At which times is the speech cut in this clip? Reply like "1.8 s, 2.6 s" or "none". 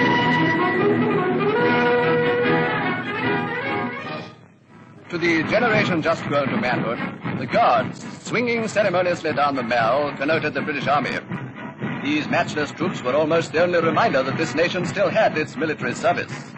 none